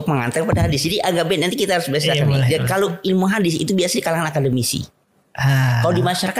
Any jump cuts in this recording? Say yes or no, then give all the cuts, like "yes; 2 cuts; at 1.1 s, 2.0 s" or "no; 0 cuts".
no; 0 cuts